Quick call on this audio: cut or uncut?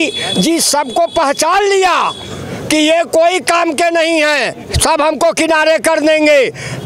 uncut